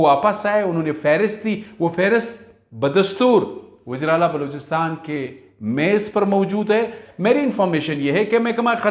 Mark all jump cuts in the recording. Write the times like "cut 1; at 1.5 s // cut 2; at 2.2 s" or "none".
cut 1; at 7.0 s